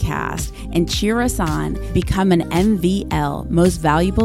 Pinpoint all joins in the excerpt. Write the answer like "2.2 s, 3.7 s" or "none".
none